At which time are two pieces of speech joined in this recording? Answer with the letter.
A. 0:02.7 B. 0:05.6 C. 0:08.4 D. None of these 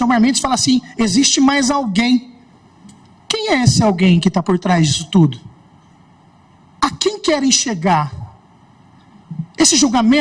D